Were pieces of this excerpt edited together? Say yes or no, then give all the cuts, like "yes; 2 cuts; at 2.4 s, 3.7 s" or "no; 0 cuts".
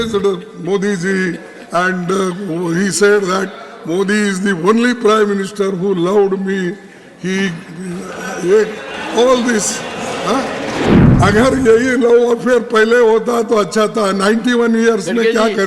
yes; 1 cut; at 11.0 s